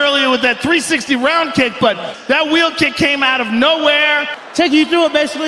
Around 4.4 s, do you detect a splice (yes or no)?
yes